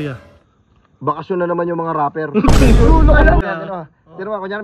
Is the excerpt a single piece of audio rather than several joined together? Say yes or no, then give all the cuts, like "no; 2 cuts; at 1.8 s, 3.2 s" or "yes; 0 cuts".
no; 1 cut; at 3.4 s